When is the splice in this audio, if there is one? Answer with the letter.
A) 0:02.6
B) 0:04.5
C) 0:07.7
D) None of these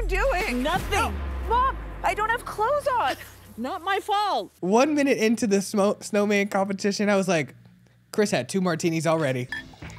B